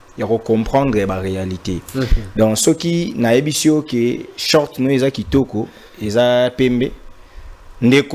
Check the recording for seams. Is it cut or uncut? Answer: uncut